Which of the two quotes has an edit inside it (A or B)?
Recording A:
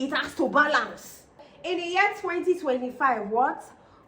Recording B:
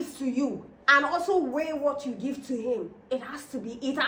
A